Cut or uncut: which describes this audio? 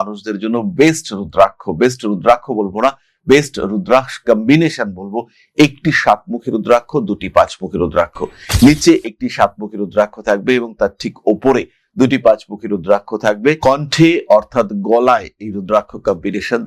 uncut